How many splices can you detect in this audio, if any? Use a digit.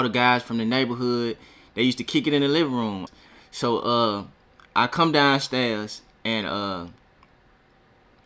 1